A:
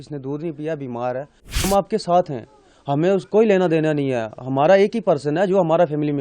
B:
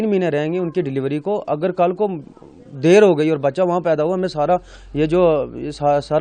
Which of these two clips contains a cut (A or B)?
A